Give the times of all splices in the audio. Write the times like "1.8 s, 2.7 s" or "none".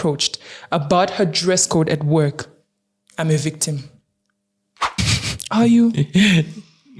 5.0 s